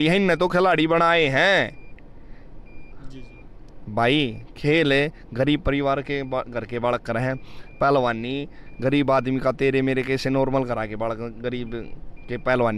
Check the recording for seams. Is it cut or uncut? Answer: uncut